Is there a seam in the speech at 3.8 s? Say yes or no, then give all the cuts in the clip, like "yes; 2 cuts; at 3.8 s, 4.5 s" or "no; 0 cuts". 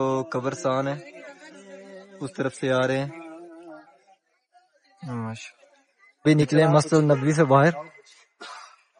no; 1 cut; at 6.1 s